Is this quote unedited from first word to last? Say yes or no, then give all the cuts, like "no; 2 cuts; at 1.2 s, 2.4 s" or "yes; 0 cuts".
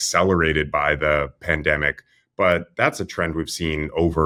yes; 0 cuts